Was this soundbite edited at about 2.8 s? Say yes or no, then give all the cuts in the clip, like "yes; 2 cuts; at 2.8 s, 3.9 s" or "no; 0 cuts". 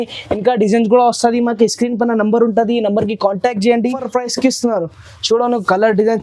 no; 1 cut; at 4.0 s